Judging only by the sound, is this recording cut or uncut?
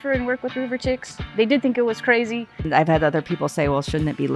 cut